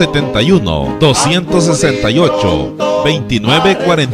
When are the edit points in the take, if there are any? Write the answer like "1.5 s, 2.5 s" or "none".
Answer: 1.9 s